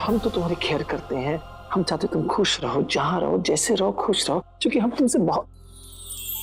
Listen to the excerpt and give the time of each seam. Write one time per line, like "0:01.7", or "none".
none

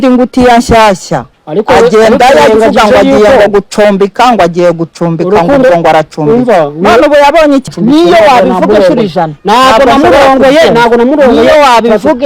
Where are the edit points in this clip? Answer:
0:07.7

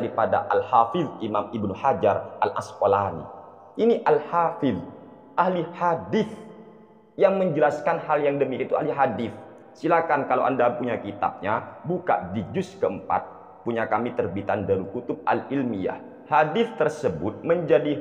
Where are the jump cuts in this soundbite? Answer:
0:16.1

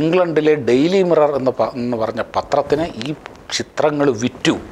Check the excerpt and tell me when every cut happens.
none

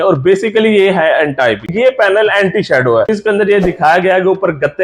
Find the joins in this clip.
0:01.7
0:03.1

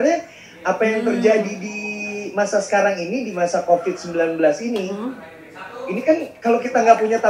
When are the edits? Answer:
none

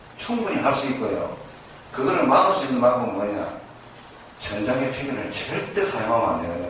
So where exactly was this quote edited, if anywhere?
none

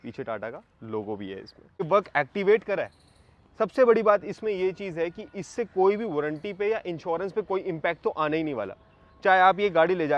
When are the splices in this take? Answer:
0:01.9

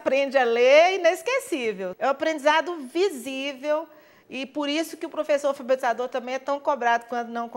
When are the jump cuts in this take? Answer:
0:01.9

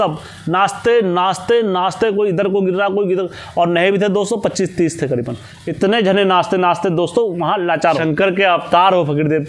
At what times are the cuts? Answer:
0:08.0

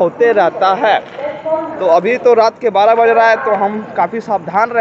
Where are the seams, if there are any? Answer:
none

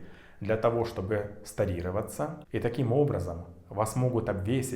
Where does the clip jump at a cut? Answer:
0:02.4

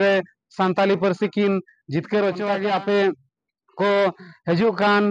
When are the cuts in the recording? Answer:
0:02.5

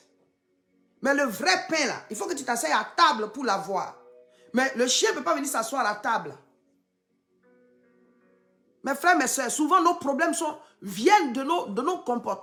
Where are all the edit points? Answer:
none

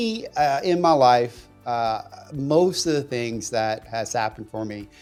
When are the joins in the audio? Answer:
none

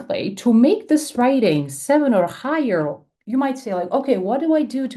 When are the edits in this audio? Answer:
none

